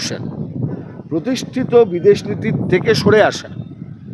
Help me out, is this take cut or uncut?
uncut